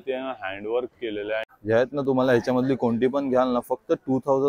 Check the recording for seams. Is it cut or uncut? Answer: cut